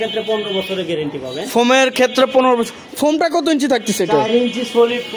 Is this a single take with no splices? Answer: yes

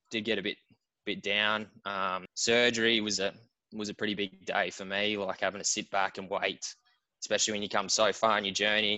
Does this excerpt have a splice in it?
yes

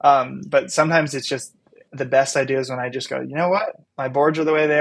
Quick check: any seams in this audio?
yes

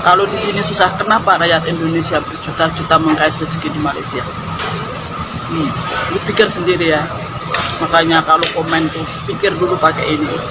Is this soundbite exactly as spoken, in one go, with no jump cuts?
yes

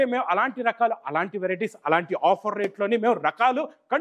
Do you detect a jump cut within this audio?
no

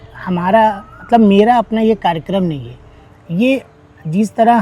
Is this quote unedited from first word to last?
yes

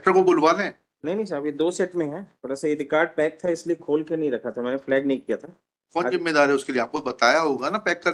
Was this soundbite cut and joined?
no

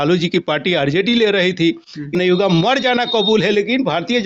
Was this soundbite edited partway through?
yes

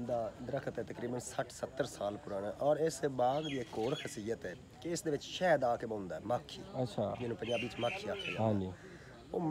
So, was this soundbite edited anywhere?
no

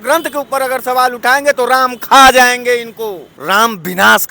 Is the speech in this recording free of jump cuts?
no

